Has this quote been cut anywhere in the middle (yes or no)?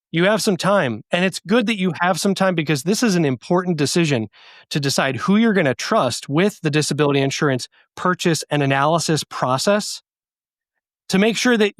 no